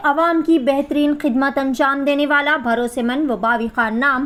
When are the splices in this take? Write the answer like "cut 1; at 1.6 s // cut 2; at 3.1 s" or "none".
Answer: none